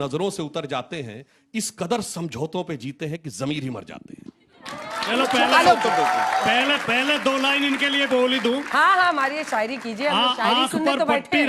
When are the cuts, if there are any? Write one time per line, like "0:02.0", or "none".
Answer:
none

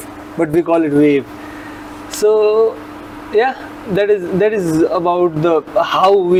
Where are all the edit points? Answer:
none

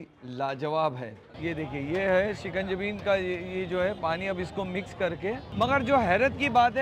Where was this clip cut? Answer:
0:01.2
0:05.5

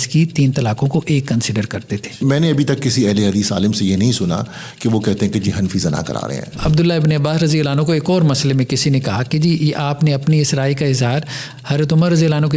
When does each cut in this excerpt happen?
0:02.2
0:06.5

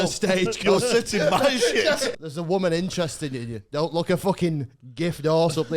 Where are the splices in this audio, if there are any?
0:02.1

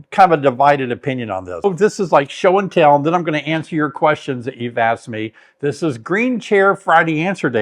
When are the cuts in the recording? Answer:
0:01.6

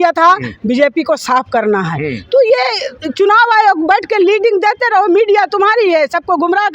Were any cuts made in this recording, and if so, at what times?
none

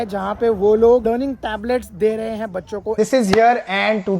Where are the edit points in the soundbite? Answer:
0:01.0
0:02.9

